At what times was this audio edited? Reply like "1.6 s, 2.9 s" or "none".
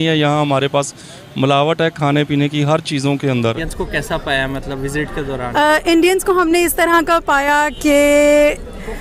3.7 s